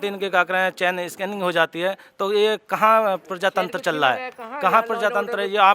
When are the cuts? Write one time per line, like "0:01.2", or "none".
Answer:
none